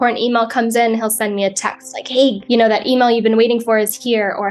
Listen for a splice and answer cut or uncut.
cut